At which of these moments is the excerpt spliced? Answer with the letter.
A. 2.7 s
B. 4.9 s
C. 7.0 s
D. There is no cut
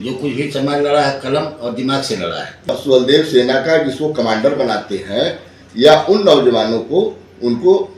A